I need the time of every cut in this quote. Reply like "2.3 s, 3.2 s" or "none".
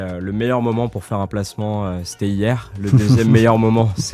none